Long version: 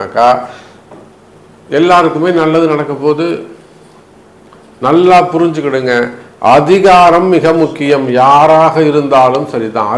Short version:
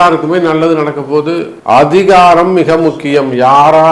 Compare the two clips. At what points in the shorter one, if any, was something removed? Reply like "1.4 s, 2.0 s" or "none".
1.5 s